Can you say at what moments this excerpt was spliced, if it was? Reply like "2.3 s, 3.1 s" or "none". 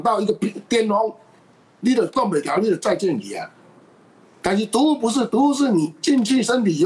none